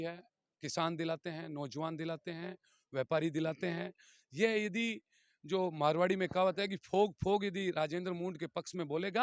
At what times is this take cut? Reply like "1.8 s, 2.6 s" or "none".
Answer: none